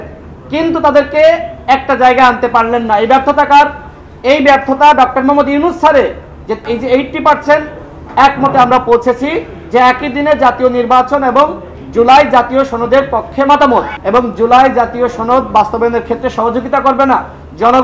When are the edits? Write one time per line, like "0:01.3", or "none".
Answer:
0:06.6
0:14.0